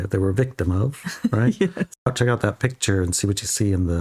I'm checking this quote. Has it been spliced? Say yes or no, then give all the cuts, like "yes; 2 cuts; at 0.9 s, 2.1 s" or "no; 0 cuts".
yes; 1 cut; at 2.0 s